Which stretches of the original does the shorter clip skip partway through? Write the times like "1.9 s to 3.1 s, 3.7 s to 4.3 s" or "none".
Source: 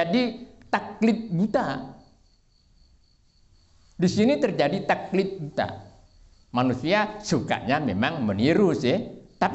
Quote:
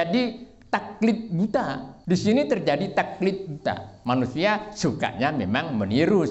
1.9 s to 3.8 s, 5.8 s to 6.4 s